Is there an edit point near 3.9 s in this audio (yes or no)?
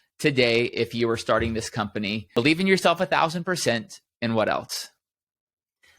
no